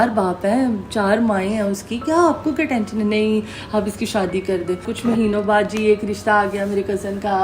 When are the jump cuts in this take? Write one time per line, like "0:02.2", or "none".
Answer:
0:04.9

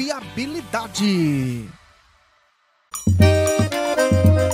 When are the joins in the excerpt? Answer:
0:02.9

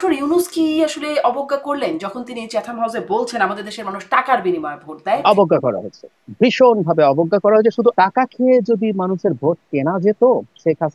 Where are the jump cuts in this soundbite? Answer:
0:05.2
0:07.9

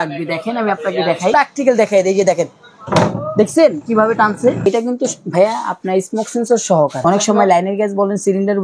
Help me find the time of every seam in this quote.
0:01.3
0:04.6
0:07.0

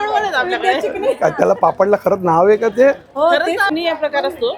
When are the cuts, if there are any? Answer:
0:03.7

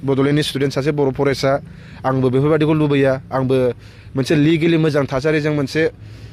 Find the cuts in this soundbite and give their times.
none

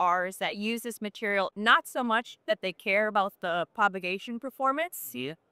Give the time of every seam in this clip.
none

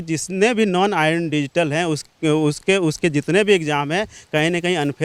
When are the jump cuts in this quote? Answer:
none

